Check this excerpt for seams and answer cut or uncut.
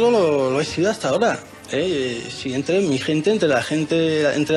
cut